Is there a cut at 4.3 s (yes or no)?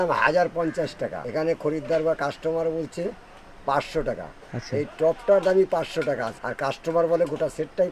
no